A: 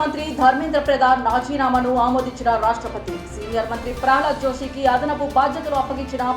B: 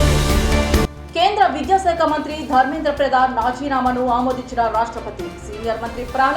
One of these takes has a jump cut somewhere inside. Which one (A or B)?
B